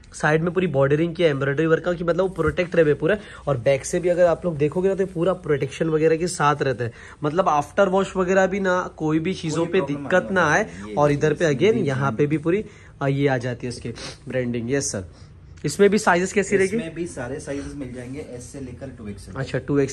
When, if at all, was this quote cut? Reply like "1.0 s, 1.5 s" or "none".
none